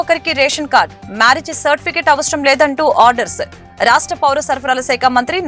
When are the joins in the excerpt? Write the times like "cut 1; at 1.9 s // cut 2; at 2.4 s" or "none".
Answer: none